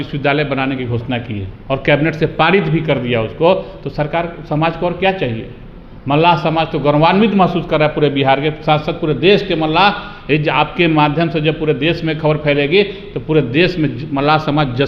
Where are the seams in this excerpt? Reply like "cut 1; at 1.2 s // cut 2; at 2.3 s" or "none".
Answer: none